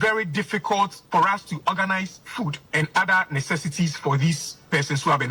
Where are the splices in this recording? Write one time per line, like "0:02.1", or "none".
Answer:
0:01.0
0:02.6